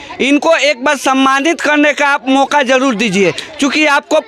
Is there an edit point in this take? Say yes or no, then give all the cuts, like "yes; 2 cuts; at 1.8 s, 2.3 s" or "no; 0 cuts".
no; 0 cuts